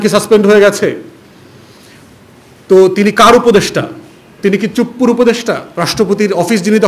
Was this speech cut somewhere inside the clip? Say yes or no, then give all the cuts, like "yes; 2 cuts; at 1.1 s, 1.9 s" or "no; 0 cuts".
no; 0 cuts